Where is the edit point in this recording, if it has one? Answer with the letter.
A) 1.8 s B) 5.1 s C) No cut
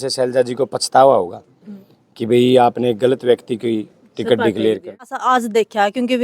B